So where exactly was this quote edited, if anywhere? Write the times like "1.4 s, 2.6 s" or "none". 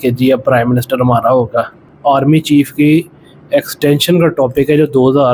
1.8 s